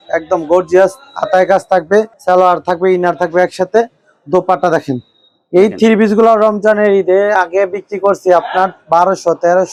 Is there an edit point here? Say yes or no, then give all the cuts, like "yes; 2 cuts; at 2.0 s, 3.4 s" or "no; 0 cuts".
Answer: no; 0 cuts